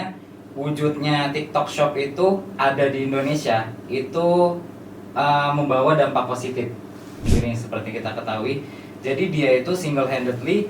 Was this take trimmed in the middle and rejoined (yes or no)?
yes